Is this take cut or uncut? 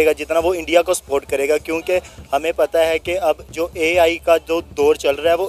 uncut